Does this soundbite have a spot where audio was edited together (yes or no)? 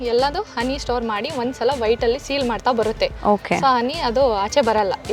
no